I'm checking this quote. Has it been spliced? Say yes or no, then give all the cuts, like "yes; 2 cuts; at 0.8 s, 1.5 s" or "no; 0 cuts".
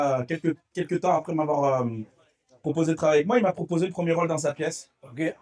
no; 0 cuts